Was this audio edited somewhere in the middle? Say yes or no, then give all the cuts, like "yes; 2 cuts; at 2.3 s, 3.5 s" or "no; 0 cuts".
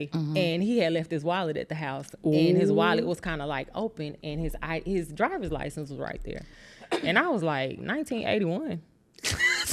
no; 0 cuts